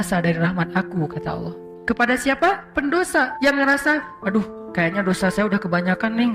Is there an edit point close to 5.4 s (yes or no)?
no